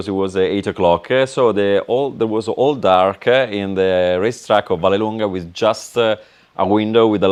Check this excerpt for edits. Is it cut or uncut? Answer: uncut